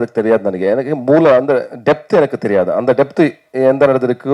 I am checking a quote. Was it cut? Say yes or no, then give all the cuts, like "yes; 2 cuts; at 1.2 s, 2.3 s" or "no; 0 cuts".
no; 0 cuts